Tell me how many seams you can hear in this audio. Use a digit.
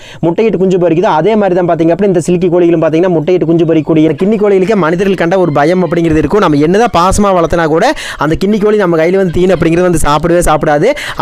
1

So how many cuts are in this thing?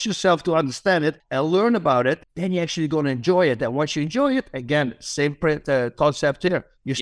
2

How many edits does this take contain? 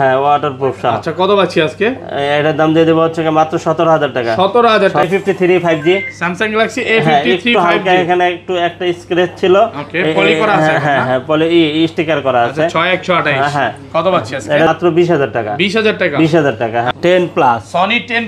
3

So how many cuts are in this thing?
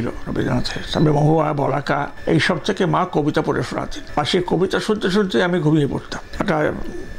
3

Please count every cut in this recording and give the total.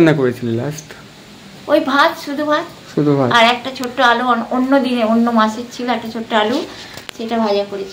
0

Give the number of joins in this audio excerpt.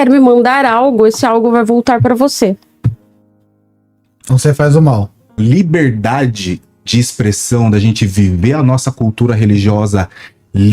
1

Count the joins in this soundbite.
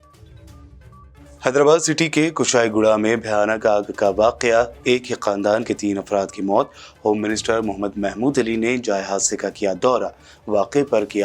1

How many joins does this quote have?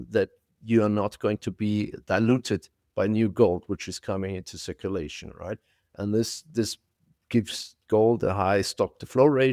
0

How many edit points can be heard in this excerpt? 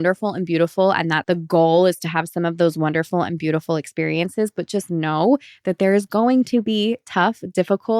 1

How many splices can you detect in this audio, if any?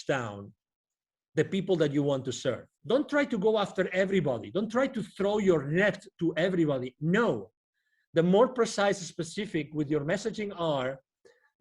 1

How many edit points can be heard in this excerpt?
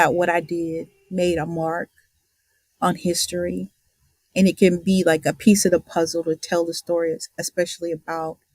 0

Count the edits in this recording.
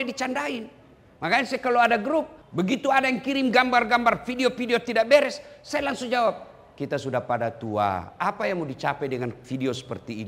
1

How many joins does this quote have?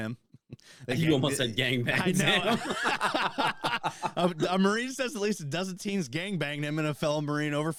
0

